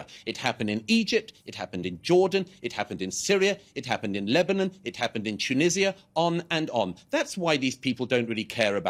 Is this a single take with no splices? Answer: yes; 0 cuts

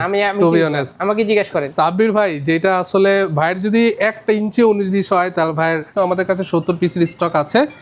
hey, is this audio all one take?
no; 1 cut; at 5.9 s

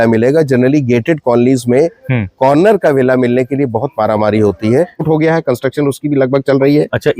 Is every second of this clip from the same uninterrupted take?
no; 1 cut; at 5.2 s

